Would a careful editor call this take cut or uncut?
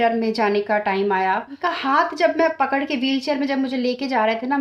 cut